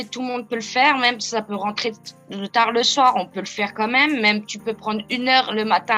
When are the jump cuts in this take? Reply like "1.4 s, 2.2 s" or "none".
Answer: none